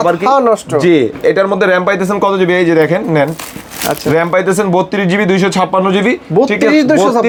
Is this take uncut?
yes; 0 cuts

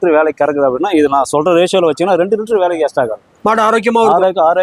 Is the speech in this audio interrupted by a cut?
no; 0 cuts

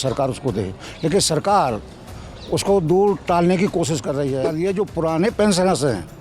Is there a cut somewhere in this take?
yes; 1 cut; at 4.5 s

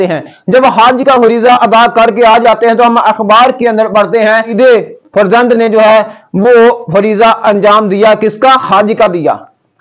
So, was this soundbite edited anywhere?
no; 0 cuts

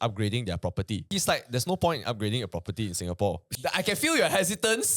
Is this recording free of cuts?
no; 2 cuts; at 1.1 s, 3.5 s

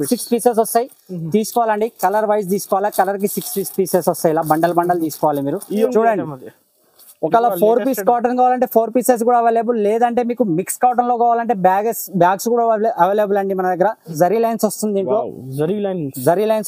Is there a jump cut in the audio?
yes; 2 cuts; at 5.9 s, 14.1 s

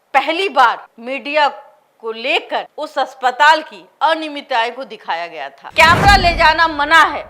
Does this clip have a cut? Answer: yes; 2 cuts; at 0.9 s, 5.7 s

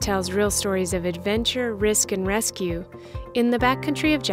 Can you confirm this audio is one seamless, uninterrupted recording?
yes; 0 cuts

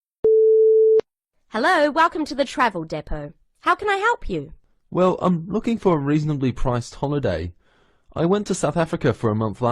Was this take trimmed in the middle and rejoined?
yes; 1 cut; at 1.0 s

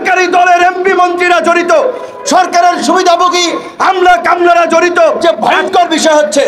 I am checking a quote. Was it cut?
yes; 1 cut; at 5.2 s

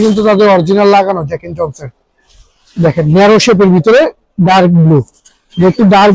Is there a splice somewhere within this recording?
no; 0 cuts

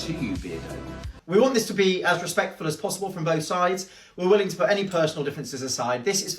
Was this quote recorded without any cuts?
no; 1 cut; at 1.1 s

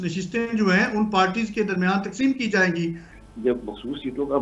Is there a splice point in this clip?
yes; 1 cut; at 3.1 s

